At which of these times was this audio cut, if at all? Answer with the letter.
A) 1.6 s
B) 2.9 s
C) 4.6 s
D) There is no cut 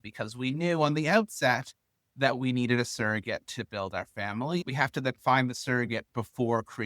C